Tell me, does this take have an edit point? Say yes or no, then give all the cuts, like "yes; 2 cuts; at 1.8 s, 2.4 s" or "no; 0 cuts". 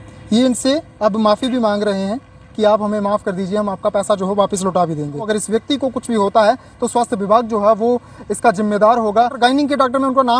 yes; 2 cuts; at 5.2 s, 9.3 s